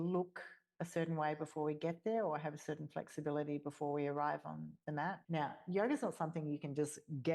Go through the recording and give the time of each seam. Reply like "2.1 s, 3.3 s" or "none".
5.2 s